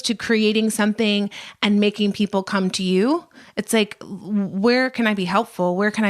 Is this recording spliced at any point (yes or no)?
no